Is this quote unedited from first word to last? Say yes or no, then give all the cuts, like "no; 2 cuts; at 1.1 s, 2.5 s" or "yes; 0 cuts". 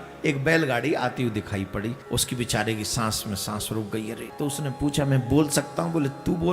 no; 2 cuts; at 2.0 s, 4.3 s